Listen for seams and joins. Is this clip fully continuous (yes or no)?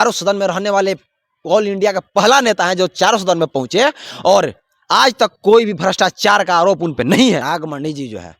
no